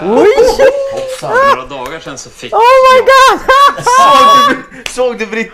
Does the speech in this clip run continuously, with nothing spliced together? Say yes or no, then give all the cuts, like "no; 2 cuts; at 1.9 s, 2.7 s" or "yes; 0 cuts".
yes; 0 cuts